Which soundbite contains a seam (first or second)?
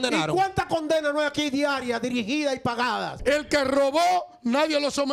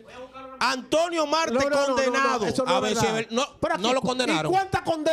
first